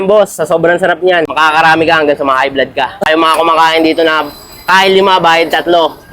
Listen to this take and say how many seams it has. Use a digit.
2